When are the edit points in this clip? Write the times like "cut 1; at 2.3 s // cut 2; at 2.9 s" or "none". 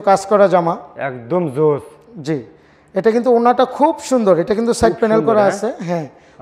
none